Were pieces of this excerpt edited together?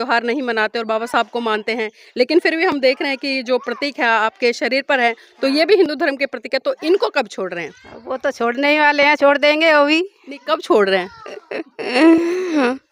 no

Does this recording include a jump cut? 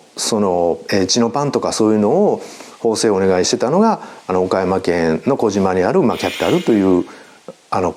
no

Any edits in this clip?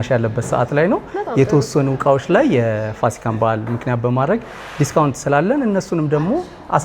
no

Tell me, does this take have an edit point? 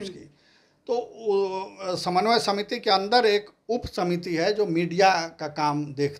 no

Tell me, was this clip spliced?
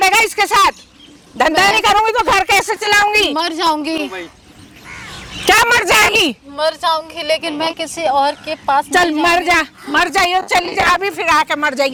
no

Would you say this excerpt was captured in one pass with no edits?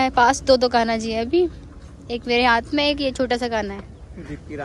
yes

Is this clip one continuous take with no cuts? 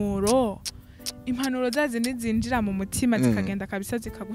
yes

